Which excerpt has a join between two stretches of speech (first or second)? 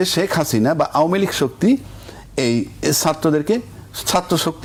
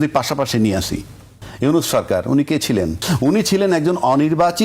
second